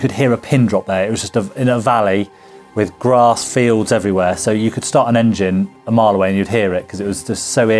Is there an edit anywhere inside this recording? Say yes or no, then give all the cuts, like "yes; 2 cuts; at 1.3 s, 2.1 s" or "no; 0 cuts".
yes; 1 cut; at 4.4 s